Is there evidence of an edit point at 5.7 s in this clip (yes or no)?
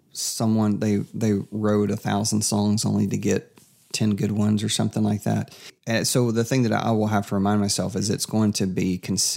yes